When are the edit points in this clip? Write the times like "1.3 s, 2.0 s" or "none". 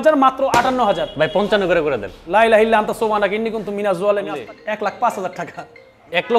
4.3 s